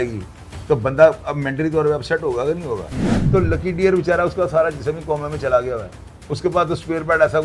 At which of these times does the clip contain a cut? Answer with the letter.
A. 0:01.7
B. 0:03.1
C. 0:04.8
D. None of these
B